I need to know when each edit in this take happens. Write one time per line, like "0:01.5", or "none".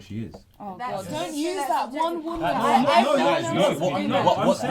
none

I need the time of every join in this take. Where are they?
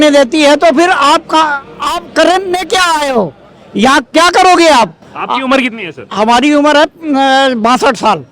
none

